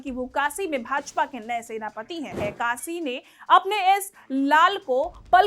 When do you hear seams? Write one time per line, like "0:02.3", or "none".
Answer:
0:02.4